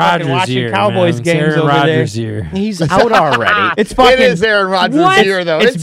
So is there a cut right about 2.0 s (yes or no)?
no